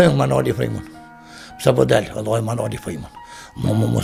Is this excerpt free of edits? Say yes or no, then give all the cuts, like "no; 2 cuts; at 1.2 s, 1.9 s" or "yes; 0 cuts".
yes; 0 cuts